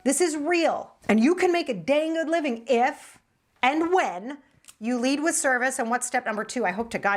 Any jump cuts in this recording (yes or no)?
yes